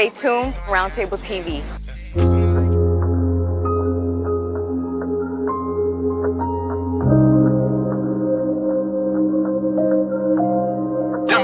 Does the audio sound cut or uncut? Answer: uncut